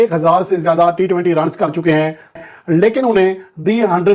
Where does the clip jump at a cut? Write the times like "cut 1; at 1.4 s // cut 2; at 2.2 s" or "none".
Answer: cut 1; at 2.5 s

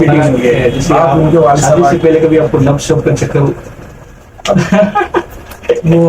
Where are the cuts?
cut 1; at 1.8 s

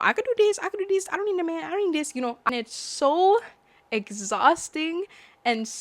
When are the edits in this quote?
cut 1; at 2.5 s

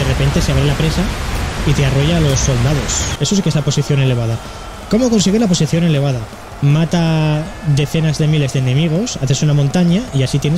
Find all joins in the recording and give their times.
cut 1; at 3.1 s

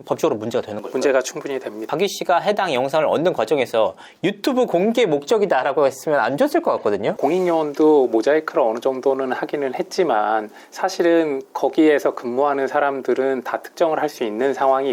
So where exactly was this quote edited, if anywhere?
cut 1; at 1.9 s // cut 2; at 7.1 s

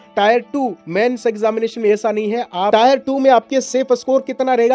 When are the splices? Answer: cut 1; at 2.7 s

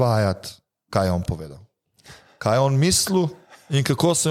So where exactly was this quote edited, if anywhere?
none

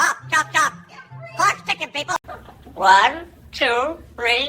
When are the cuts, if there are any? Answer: cut 1; at 2.3 s

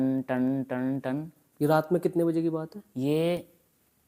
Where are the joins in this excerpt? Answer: cut 1; at 1.4 s

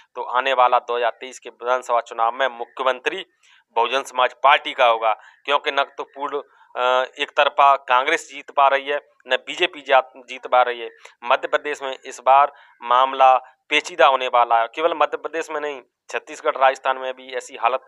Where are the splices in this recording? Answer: none

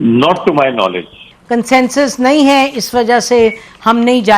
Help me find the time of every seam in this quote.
cut 1; at 1.3 s

